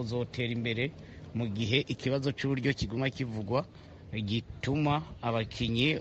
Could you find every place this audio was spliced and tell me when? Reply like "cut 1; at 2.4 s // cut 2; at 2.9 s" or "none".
none